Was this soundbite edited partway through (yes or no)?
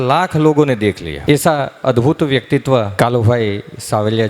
yes